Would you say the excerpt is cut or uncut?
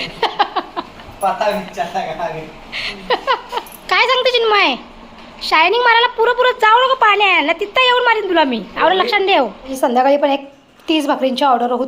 cut